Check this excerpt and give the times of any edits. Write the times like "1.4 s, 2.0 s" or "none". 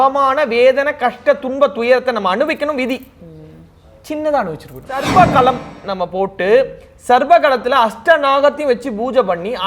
5.1 s